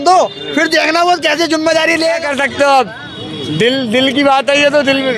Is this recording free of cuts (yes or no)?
no